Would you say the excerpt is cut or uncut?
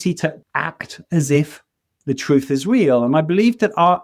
uncut